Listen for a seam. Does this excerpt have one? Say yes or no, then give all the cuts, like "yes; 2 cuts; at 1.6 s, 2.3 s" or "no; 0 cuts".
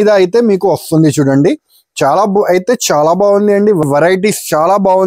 yes; 1 cut; at 3.8 s